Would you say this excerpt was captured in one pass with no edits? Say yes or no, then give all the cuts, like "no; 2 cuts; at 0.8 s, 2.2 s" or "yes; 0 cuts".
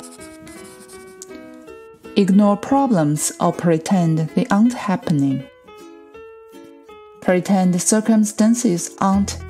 no; 1 cut; at 2.1 s